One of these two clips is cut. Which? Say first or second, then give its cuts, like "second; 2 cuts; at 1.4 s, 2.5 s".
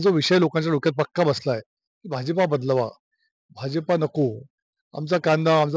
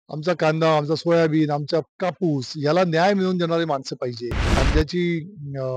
second; 1 cut; at 4.3 s